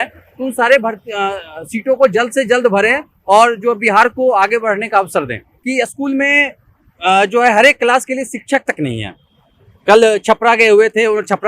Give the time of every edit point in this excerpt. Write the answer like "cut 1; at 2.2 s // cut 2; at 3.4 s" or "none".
cut 1; at 5.5 s